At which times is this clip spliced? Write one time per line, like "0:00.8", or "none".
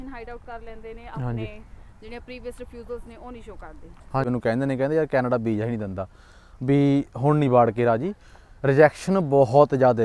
0:04.3